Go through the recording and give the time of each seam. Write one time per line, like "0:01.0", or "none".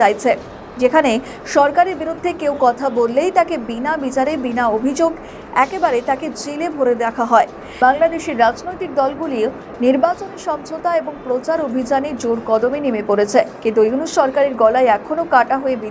0:07.6